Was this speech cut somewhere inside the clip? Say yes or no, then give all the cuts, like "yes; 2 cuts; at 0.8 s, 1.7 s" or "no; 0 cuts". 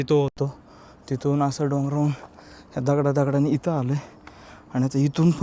no; 0 cuts